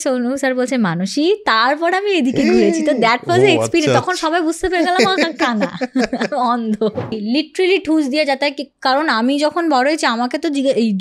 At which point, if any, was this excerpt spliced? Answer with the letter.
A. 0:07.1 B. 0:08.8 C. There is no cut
A